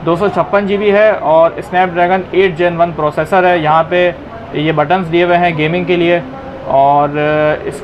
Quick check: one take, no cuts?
yes; 0 cuts

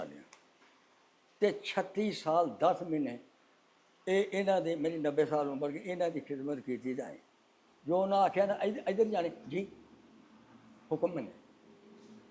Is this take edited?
no; 0 cuts

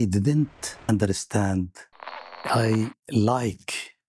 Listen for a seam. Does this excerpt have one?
yes; 2 cuts; at 0.9 s, 2.4 s

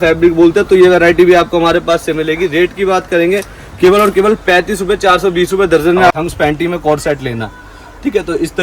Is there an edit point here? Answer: yes; 1 cut; at 6.2 s

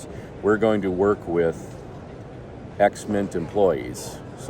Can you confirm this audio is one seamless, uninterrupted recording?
yes; 0 cuts

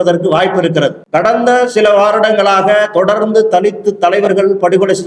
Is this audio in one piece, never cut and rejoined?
no; 1 cut; at 1.0 s

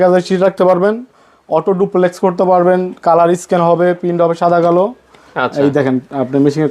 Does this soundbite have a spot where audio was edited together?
no; 0 cuts

